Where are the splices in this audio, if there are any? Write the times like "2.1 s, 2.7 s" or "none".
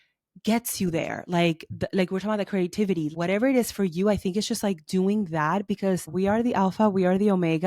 3.1 s, 6.1 s